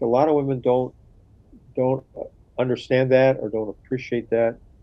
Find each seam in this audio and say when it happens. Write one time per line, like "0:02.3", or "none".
none

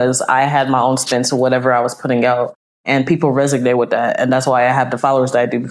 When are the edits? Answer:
none

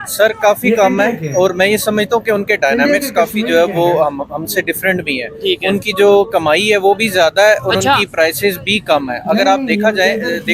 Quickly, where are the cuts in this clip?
none

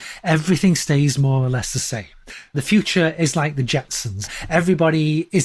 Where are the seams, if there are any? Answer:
0:02.5
0:04.4

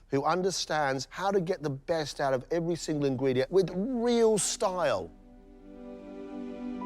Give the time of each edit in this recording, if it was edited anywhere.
0:03.5
0:06.2

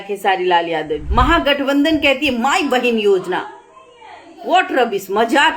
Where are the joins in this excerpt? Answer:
0:01.1

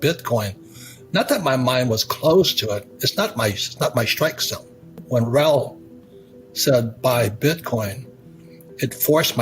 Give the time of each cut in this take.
0:05.0

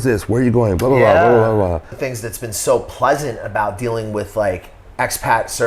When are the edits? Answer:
0:02.0

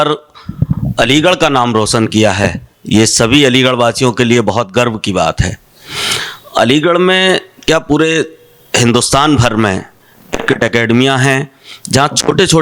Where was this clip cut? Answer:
none

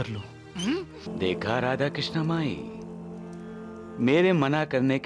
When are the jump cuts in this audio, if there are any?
0:01.1

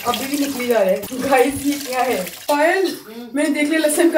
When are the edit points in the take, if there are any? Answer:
0:01.1

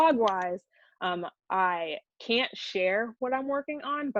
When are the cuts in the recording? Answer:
none

